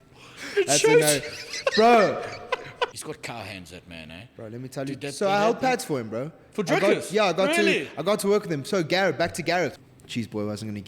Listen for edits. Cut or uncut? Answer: cut